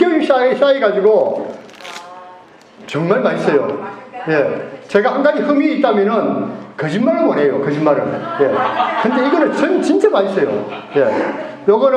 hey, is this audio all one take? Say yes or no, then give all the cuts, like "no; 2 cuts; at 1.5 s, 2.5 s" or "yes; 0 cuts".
yes; 0 cuts